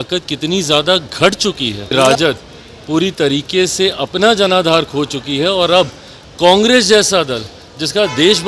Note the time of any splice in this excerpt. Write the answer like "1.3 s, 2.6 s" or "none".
1.9 s